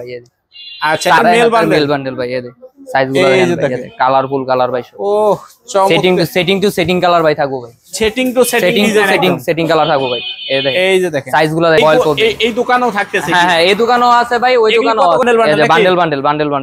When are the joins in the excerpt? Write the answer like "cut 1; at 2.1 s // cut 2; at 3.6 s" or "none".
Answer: cut 1; at 1.2 s // cut 2; at 11.8 s // cut 3; at 15.2 s